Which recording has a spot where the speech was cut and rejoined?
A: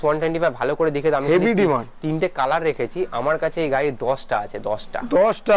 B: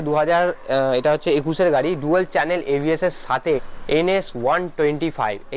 B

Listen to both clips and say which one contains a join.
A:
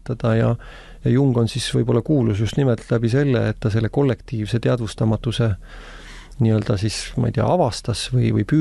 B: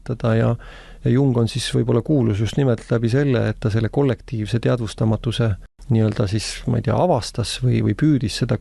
B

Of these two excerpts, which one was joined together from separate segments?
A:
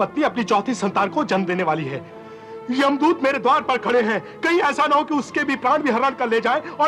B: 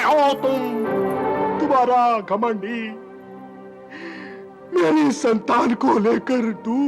B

